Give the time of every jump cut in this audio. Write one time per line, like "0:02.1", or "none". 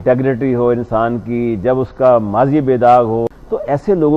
0:03.3

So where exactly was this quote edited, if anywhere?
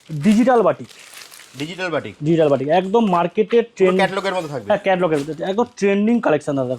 none

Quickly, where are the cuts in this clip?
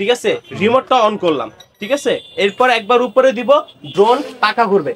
none

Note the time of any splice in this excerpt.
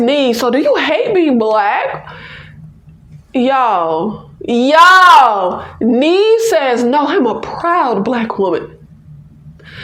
none

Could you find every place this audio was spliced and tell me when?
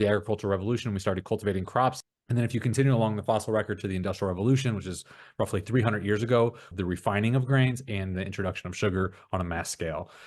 0:02.0
0:06.7

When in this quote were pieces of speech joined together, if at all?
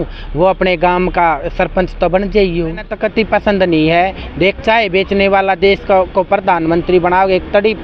0:02.9

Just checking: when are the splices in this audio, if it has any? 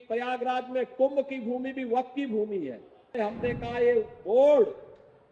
0:03.2

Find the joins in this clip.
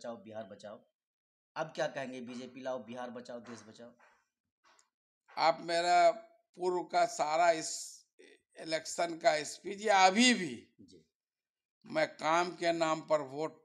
none

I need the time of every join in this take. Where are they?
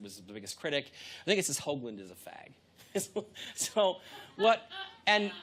none

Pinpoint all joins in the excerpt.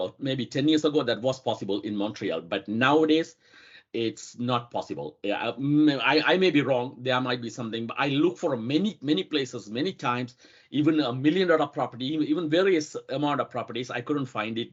none

